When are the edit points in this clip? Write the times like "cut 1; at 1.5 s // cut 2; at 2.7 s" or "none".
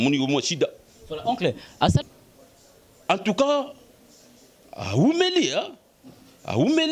cut 1; at 2.0 s